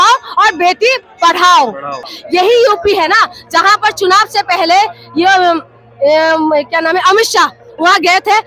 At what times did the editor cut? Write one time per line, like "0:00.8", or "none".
0:02.2